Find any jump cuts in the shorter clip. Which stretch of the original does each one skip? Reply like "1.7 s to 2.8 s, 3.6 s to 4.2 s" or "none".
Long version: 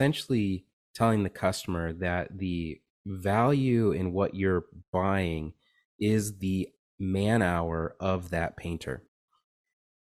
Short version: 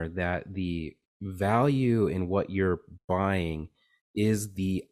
none